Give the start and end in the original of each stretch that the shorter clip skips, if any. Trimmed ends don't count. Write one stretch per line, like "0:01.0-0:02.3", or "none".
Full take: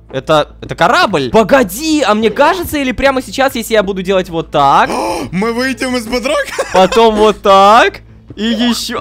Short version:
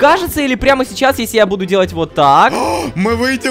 none